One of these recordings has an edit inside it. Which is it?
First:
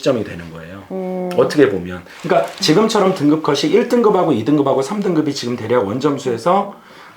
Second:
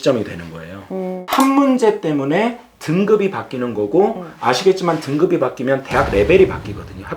second; 1 cut; at 1.2 s

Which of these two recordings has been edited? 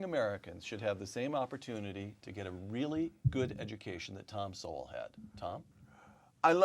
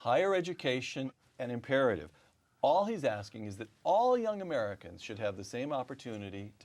first; 1 cut; at 5.7 s

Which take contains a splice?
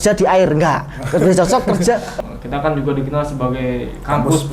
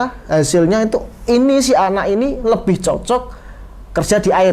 first; 1 cut; at 2.1 s

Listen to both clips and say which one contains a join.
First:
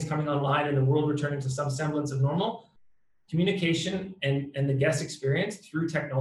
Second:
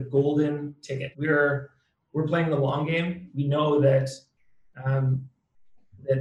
second; 2 cuts; at 1.1 s, 3.3 s

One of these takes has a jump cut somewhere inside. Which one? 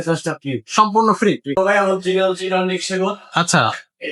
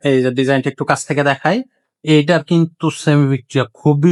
first; 1 cut; at 1.6 s

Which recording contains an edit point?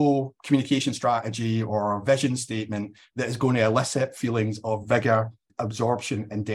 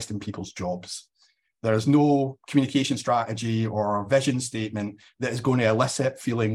first; 1 cut; at 5.4 s

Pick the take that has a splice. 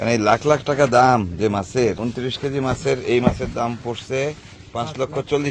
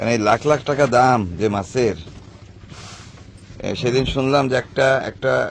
first; 2 cuts; at 2.0 s, 4.6 s

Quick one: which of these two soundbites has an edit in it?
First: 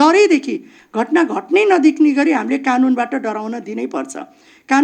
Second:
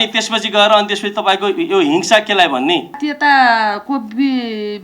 second; 1 cut; at 3.1 s

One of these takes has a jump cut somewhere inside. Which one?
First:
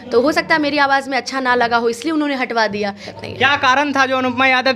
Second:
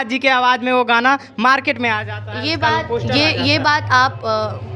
first; 1 cut; at 3.0 s

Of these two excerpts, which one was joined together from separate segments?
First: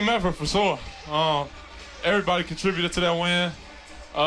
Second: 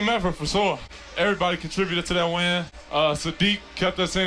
second; 2 cuts; at 0.9 s, 2.8 s

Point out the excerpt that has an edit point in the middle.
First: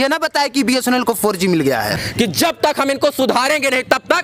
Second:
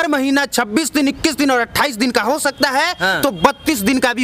first; 1 cut; at 1.9 s

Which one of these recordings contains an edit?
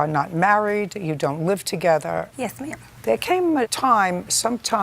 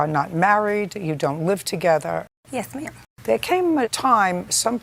first; 1 cut; at 2.6 s

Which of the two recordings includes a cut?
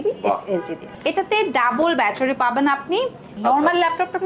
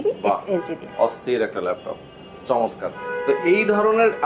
first; 2 cuts; at 0.9 s, 3.3 s

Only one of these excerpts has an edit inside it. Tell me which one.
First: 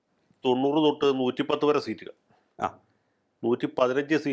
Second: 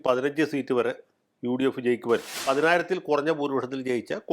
second; 1 cut; at 2.4 s

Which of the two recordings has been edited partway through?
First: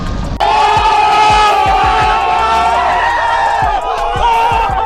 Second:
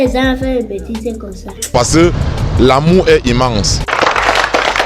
second; 1 cut; at 3.8 s

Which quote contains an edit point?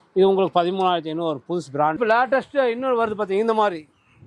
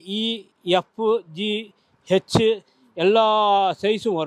first; 1 cut; at 2.0 s

